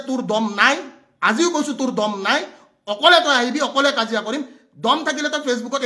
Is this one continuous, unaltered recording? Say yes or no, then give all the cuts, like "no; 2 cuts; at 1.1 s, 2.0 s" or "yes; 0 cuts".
yes; 0 cuts